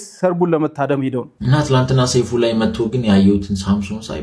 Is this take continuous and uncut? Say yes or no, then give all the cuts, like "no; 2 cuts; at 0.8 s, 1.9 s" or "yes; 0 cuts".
no; 1 cut; at 1.2 s